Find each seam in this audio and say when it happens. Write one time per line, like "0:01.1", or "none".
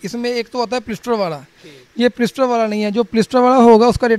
none